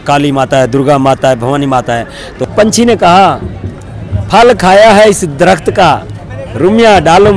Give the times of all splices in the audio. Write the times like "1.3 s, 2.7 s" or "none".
2.4 s